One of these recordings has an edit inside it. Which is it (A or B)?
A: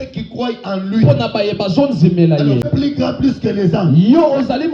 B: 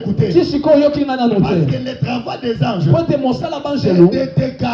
A